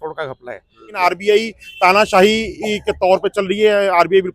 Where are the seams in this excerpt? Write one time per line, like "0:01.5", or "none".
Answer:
0:01.0